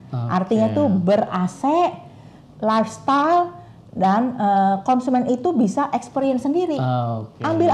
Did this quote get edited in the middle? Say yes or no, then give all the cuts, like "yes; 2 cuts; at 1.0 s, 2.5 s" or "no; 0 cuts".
no; 0 cuts